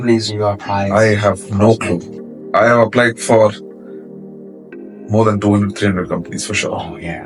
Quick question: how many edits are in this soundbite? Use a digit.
0